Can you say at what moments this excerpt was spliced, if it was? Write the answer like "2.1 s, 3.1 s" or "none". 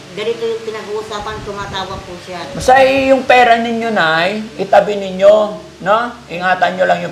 2.5 s